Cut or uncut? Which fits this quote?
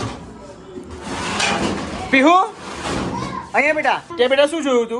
cut